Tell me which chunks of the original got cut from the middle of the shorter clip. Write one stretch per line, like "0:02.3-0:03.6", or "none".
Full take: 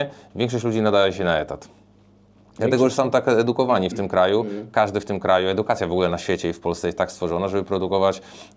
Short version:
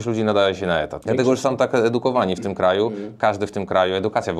0:01.5-0:02.5